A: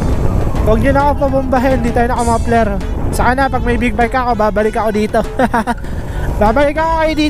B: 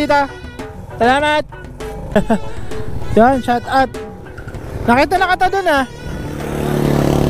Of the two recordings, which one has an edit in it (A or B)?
B